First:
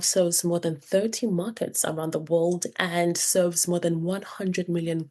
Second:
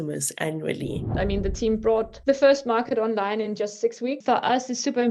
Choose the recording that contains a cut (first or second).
second